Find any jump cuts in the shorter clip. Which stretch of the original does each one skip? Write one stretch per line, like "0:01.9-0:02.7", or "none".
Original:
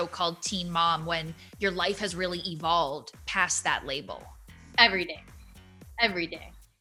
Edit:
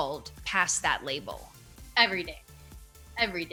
none

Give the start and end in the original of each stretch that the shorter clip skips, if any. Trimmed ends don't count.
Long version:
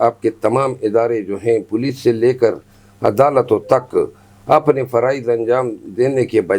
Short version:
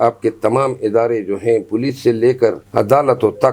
0:02.6-0:02.9

